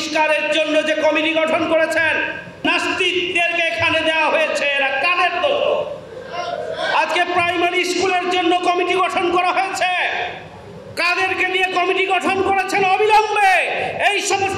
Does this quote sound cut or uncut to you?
cut